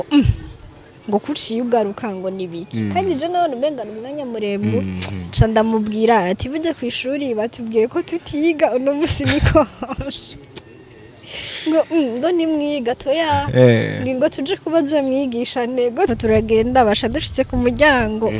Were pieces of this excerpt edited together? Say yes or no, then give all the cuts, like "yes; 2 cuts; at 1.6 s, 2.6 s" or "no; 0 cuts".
yes; 1 cut; at 16.1 s